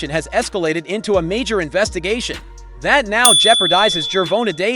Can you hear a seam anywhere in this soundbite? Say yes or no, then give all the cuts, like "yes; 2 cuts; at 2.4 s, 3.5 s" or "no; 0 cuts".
no; 0 cuts